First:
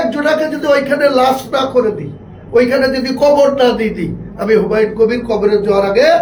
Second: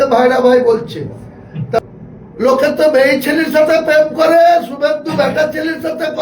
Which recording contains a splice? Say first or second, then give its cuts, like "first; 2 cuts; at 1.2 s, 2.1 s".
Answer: second; 1 cut; at 1.8 s